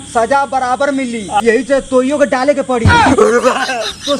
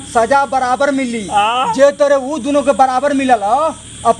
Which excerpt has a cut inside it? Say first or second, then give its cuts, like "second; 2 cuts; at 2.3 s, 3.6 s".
first; 1 cut; at 1.4 s